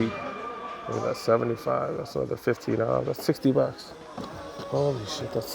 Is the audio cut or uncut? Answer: uncut